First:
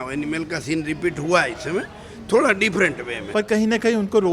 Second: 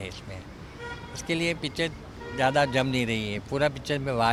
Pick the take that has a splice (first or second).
first